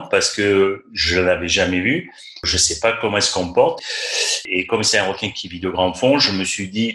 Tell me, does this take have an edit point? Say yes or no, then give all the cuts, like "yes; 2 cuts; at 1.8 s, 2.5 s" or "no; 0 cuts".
yes; 1 cut; at 3.9 s